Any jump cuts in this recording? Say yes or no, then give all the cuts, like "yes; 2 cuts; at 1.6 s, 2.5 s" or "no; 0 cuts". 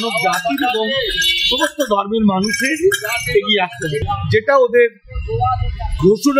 yes; 1 cut; at 4.0 s